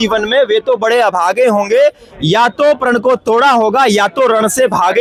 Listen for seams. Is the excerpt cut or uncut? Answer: uncut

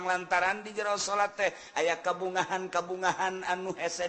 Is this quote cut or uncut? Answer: uncut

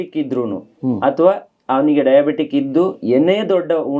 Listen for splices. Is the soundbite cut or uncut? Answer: uncut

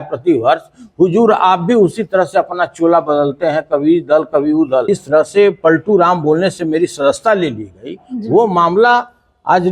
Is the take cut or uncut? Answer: cut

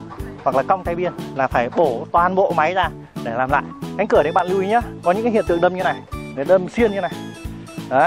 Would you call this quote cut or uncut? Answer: cut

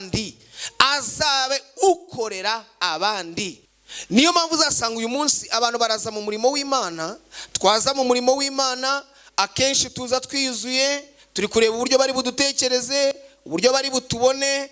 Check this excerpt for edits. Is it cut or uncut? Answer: cut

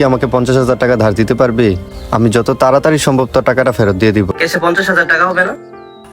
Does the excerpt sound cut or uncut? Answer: cut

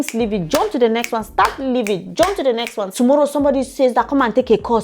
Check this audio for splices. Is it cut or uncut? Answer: cut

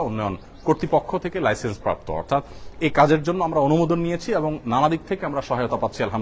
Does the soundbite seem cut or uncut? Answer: uncut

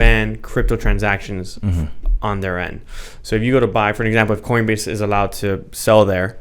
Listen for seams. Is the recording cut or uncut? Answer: uncut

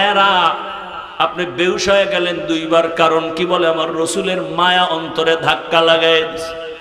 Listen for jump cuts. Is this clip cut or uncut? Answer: uncut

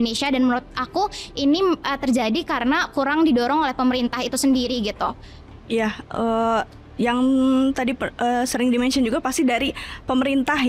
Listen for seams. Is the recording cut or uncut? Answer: uncut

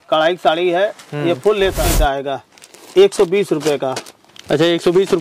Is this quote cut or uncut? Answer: cut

